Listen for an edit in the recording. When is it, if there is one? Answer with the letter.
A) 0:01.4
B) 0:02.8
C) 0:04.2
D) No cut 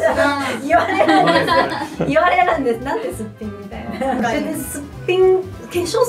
C